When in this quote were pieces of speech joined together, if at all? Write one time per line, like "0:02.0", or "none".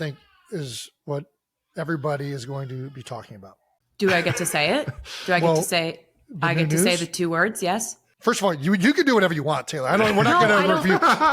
0:08.2